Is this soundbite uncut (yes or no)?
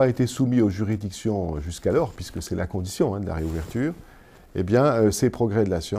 yes